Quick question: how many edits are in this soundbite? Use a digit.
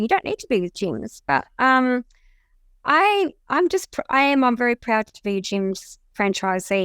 0